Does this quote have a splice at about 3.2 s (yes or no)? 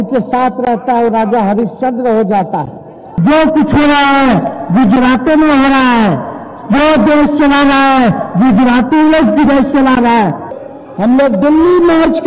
yes